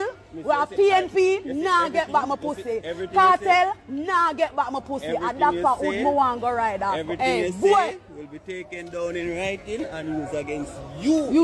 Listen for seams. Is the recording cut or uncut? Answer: uncut